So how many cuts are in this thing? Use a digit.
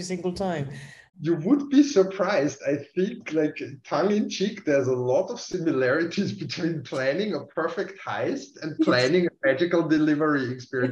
1